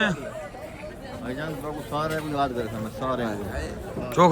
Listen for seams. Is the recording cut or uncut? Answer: uncut